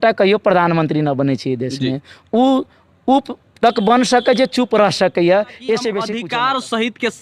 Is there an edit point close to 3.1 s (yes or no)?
no